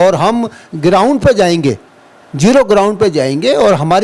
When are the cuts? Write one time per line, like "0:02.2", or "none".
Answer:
none